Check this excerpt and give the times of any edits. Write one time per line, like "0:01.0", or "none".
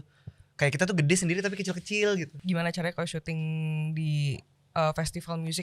0:02.3